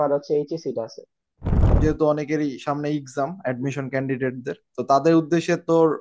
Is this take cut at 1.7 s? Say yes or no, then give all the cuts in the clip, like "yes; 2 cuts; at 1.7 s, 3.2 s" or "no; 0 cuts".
yes; 1 cut; at 1.7 s